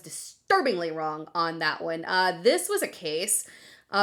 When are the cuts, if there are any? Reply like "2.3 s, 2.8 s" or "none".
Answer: none